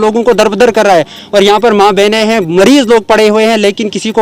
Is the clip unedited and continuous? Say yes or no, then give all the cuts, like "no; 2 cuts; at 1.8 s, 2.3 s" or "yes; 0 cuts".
yes; 0 cuts